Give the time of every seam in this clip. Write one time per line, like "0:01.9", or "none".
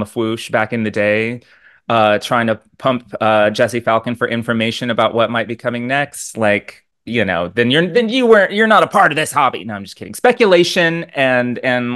none